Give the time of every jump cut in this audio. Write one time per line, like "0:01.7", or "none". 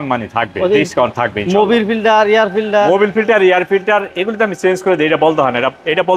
none